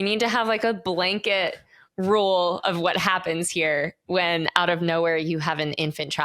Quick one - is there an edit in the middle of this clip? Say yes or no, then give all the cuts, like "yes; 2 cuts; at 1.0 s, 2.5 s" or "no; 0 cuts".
no; 0 cuts